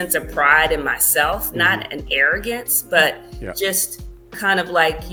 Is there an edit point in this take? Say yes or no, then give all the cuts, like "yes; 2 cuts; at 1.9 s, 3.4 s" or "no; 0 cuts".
no; 0 cuts